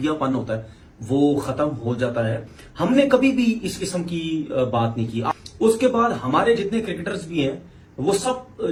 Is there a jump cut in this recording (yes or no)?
no